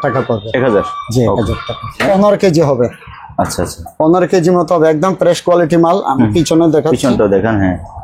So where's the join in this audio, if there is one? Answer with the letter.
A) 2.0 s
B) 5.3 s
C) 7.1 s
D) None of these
A